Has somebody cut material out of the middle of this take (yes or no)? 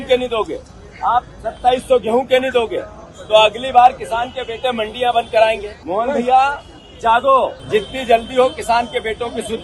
yes